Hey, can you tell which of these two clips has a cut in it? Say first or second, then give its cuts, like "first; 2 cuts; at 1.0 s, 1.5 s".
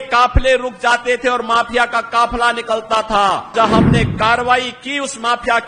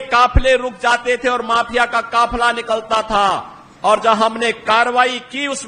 first; 1 cut; at 3.5 s